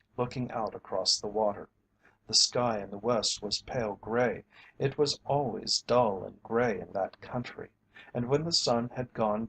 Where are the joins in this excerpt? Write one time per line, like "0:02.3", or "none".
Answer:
none